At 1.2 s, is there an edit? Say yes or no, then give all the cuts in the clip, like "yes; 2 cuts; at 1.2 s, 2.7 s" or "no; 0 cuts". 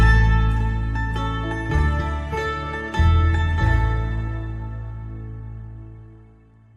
no; 0 cuts